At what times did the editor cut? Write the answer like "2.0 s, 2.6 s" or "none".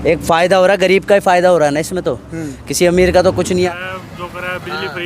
3.7 s

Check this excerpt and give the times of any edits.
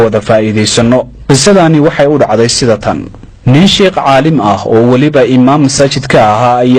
none

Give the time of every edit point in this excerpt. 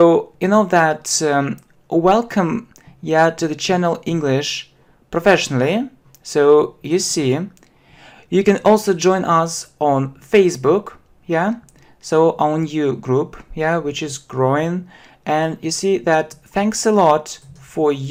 none

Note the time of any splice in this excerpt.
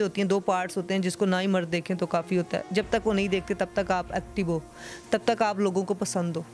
none

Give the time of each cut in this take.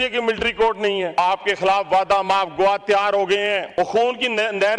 1.2 s, 3.7 s

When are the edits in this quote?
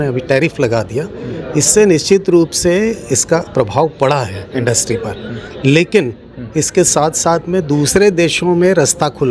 none

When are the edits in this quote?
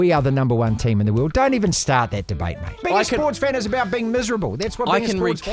2.8 s

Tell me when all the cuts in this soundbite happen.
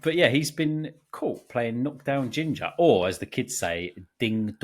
none

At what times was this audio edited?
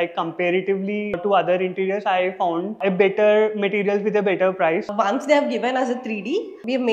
1.2 s, 4.9 s

